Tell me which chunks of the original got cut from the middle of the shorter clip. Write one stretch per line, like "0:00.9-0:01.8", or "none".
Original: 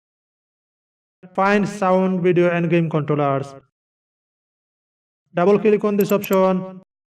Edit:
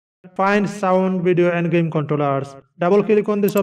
0:03.6-0:05.2